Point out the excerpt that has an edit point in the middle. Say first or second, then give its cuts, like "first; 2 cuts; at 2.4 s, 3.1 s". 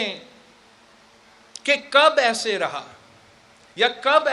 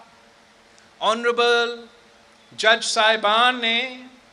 first; 1 cut; at 1.3 s